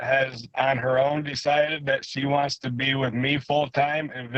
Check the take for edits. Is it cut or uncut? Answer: uncut